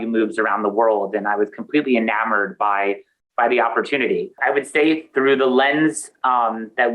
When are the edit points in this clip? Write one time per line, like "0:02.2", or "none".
0:04.3